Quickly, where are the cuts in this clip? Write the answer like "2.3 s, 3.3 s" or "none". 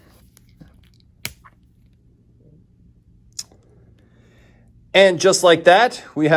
1.9 s